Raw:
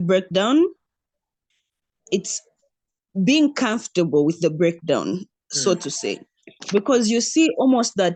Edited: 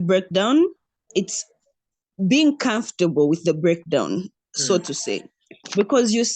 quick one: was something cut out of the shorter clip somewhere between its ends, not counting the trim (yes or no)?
yes